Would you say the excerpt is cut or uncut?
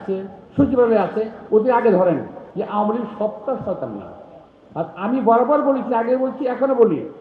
cut